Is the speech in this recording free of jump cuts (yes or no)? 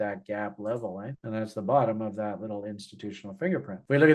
no